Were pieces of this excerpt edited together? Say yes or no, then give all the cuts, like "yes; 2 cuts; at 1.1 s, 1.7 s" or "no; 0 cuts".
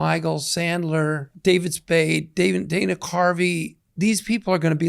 yes; 1 cut; at 1.3 s